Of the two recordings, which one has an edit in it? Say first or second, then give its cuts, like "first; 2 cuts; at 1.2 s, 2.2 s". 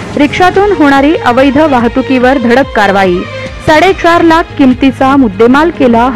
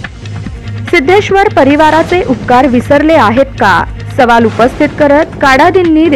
second; 1 cut; at 0.9 s